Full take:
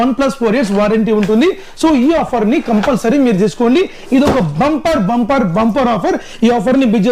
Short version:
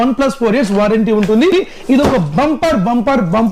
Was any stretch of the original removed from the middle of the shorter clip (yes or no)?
yes